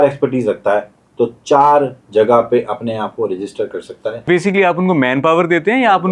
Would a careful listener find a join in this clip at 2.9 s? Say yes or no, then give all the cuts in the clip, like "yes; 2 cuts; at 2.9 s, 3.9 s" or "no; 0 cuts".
no; 1 cut; at 4.3 s